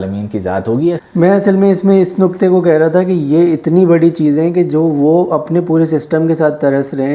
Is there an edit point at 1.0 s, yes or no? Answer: yes